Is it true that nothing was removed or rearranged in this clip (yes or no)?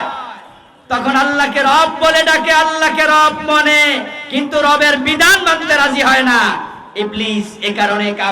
yes